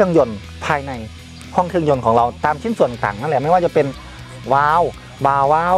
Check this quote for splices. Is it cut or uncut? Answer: uncut